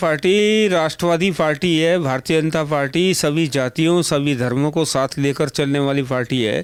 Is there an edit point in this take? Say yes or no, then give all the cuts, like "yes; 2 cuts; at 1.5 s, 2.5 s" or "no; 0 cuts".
no; 0 cuts